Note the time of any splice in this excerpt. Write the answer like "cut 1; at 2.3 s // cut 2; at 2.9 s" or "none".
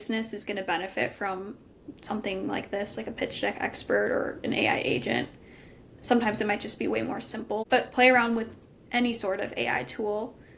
cut 1; at 7.6 s